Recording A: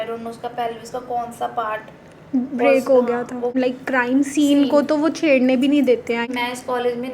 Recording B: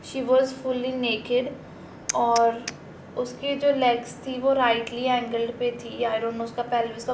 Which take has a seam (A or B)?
A